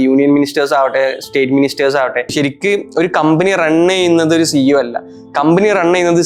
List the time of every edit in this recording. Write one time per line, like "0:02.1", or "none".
0:02.3